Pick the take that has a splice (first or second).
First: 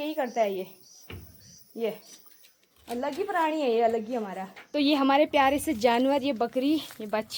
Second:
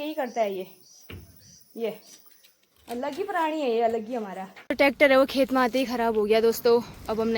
second